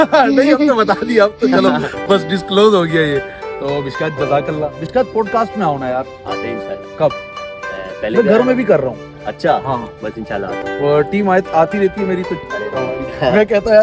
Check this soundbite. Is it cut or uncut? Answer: cut